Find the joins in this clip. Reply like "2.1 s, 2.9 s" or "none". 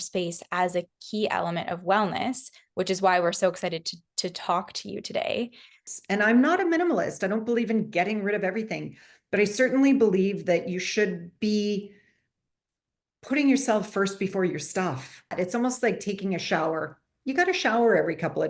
5.7 s, 15.3 s